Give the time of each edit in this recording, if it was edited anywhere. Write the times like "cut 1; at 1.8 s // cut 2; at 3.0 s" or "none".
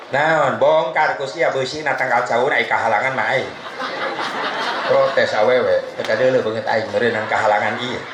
none